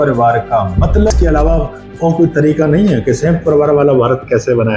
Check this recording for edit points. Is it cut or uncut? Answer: cut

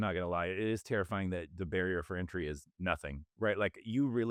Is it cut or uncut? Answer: uncut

